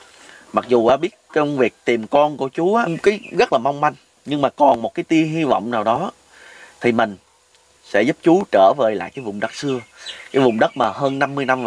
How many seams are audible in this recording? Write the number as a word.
one